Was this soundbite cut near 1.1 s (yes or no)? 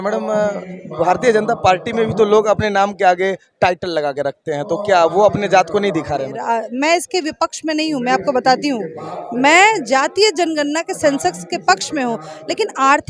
no